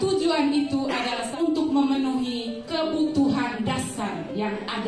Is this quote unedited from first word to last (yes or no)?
no